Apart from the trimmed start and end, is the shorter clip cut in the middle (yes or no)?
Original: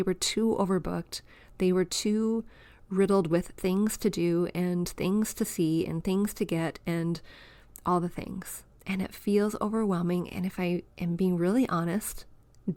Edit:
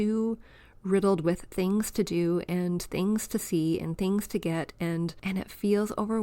yes